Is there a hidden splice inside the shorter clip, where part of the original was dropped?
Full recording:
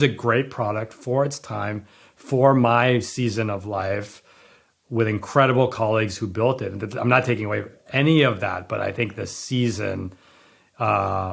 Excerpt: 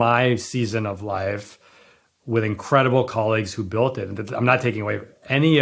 no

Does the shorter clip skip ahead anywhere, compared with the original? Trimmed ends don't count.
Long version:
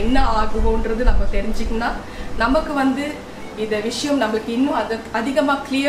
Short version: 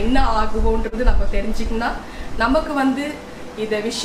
no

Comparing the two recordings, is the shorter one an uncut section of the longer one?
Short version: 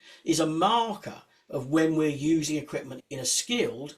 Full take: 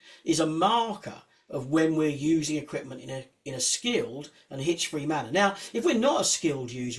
no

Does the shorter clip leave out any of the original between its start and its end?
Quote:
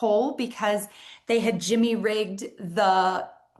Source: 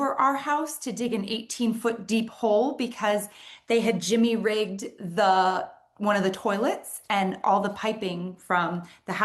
no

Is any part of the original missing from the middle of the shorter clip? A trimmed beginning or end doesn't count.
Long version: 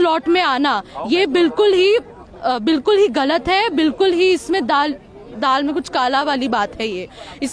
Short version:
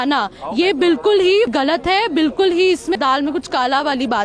yes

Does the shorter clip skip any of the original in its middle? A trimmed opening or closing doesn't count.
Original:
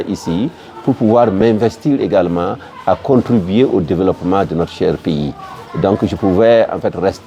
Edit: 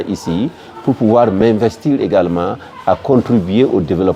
no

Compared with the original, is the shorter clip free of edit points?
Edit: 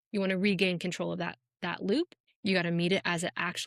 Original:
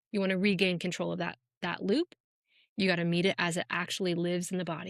no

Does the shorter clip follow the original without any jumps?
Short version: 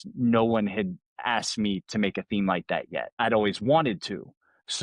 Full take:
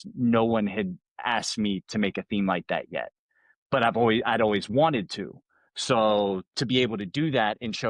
no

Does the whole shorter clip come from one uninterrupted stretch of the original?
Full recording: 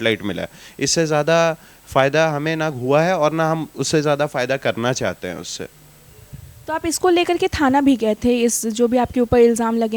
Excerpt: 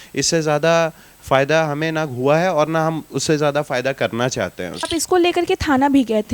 no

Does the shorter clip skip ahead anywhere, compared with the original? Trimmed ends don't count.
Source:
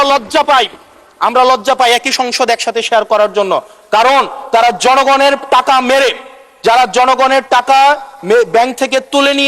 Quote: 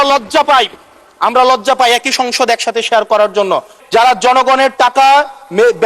yes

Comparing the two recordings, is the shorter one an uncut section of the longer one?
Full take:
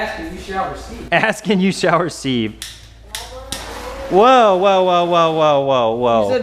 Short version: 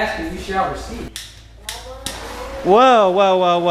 no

